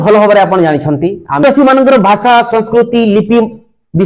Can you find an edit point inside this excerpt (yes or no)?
yes